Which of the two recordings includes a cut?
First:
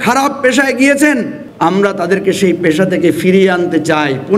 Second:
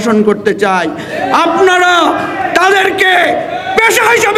first; 1 cut; at 1.4 s

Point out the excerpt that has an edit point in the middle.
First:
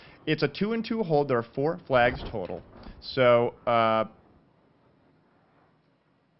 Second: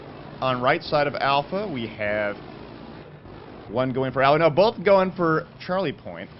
second; 1 cut; at 2.3 s

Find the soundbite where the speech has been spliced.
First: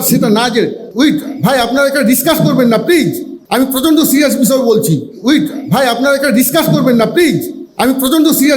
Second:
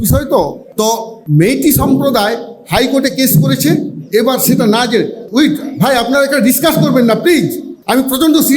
first; 1 cut; at 5.1 s

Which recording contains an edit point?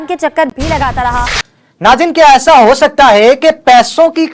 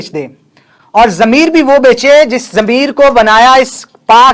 first; 1 cut; at 1.4 s

